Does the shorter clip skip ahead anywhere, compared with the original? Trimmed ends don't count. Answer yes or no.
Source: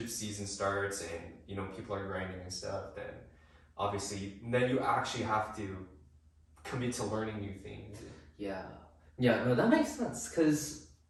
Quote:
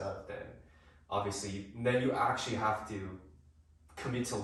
no